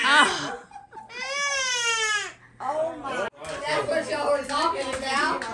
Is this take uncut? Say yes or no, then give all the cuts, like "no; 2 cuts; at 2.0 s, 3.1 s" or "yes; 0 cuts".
no; 1 cut; at 3.5 s